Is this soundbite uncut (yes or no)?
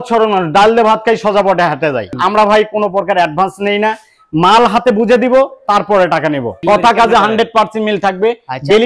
no